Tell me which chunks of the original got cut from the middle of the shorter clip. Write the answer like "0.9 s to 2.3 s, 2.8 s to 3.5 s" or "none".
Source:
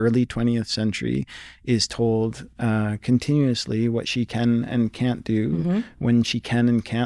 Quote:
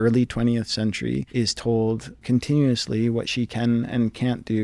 1.3 s to 1.6 s, 2.5 s to 3.0 s